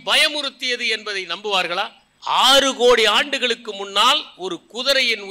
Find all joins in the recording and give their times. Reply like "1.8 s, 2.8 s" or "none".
2.1 s